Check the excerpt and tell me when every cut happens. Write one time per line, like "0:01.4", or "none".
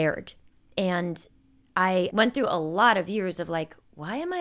0:02.1